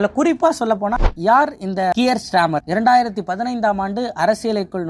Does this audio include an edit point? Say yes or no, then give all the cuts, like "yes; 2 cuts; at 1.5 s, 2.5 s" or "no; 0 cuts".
yes; 1 cut; at 1.0 s